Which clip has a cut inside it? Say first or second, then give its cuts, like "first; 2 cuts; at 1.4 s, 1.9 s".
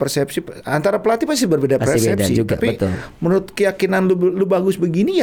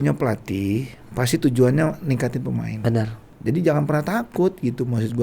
second; 1 cut; at 3.2 s